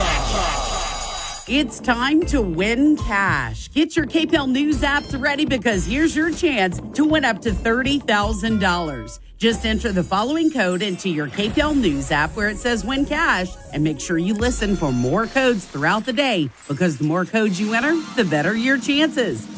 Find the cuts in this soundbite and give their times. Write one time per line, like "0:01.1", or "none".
none